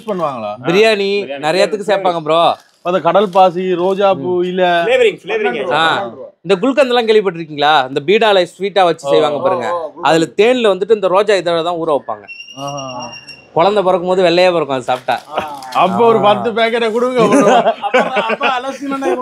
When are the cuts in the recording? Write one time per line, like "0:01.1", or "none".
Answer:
none

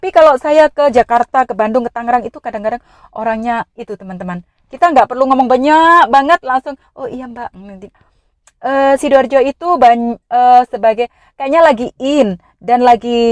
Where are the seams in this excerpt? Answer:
0:08.1

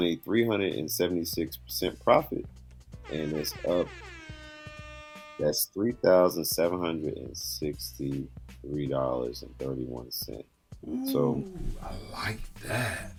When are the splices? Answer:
none

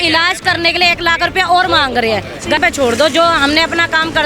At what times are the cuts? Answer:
0:02.6

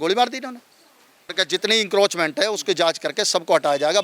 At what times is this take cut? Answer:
0:01.3

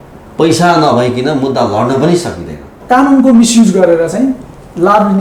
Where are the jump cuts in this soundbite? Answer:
0:02.8

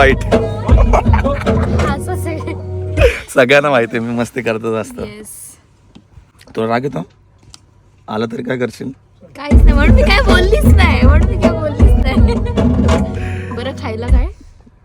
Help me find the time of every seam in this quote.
none

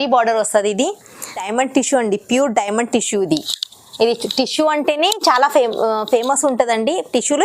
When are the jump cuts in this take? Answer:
0:01.5

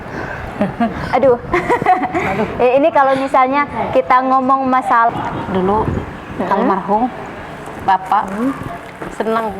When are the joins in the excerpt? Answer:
0:05.1

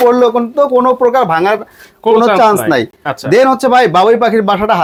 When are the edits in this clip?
none

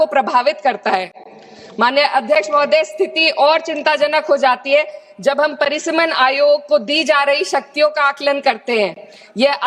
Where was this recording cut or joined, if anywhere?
none

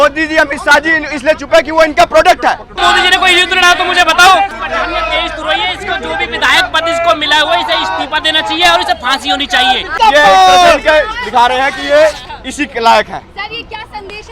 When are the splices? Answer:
0:02.8
0:04.5
0:09.9

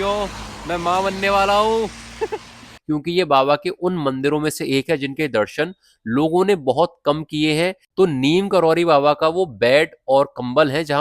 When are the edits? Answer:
0:02.7
0:07.8

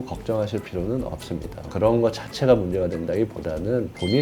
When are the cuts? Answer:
0:01.7

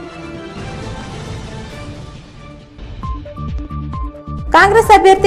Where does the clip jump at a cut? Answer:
none

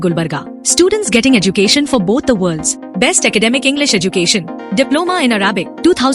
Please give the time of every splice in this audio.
none

